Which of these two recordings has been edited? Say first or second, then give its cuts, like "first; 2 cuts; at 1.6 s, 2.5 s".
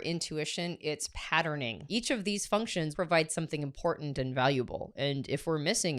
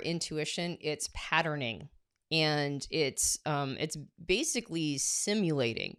first; 2 cuts; at 1.8 s, 2.9 s